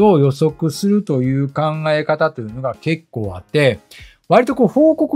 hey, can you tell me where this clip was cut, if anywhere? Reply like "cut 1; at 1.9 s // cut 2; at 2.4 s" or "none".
none